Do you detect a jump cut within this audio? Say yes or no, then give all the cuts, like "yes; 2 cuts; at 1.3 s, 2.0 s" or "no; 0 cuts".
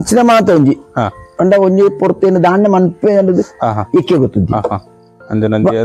no; 0 cuts